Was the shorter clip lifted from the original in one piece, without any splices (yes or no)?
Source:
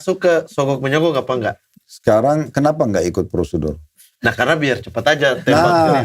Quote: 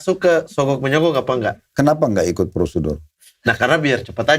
no